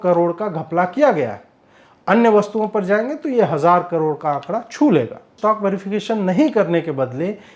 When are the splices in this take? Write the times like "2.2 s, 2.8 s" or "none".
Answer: 5.3 s